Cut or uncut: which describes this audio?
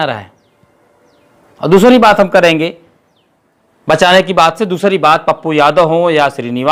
uncut